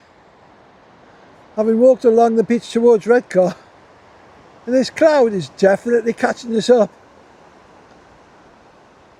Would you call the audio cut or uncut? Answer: uncut